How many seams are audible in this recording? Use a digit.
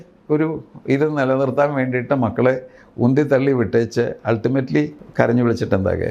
1